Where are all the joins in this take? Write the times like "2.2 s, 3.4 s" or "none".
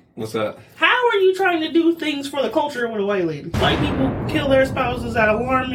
3.5 s